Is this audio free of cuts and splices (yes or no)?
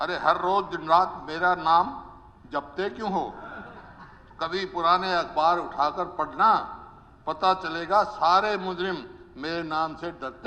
yes